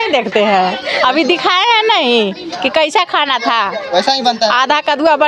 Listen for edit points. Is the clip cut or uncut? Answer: uncut